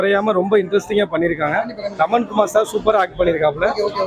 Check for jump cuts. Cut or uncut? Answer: uncut